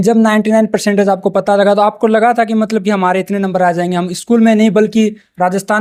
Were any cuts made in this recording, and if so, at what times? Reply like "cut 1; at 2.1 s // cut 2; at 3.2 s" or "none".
none